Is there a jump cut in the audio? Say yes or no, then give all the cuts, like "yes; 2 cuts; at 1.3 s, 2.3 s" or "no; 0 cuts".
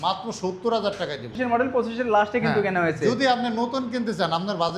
yes; 1 cut; at 1.3 s